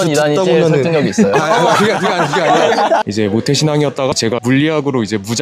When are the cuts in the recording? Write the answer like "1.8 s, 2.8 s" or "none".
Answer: 3.0 s, 4.2 s